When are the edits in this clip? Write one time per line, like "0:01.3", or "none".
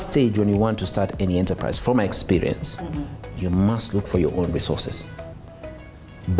none